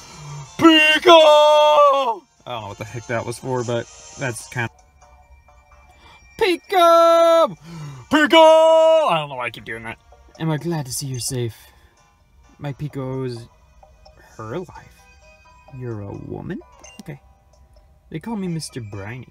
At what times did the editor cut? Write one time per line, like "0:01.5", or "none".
0:04.7